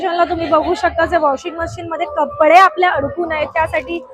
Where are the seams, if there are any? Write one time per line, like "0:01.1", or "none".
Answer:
none